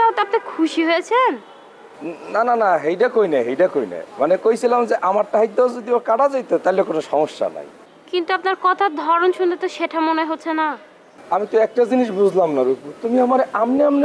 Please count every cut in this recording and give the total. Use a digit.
0